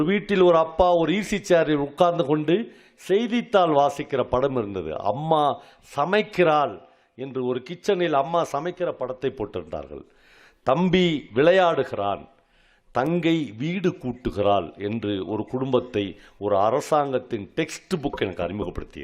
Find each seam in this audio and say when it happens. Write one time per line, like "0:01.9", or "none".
none